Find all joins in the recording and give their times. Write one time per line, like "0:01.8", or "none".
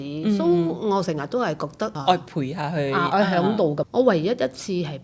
0:02.0
0:03.8